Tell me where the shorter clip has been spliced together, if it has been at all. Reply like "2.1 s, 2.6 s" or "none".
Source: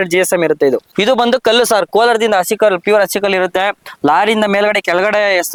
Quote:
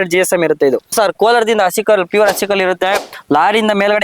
0.9 s